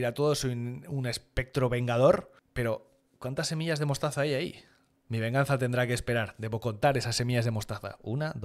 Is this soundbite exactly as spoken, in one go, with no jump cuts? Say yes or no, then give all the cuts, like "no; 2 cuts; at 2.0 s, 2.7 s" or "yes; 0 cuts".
yes; 0 cuts